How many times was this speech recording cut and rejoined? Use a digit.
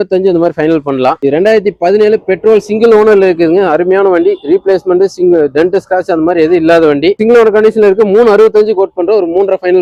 0